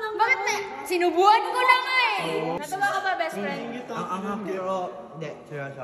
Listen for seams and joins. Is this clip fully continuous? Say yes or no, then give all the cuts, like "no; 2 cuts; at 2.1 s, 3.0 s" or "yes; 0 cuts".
no; 1 cut; at 2.6 s